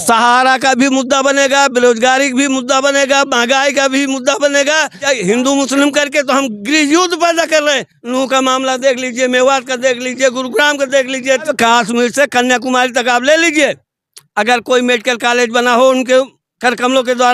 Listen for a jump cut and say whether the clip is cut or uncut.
cut